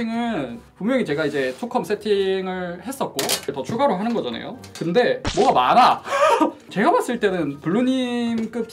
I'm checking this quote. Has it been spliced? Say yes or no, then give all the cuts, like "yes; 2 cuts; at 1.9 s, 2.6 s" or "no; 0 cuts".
yes; 3 cuts; at 3.5 s, 5.2 s, 6.6 s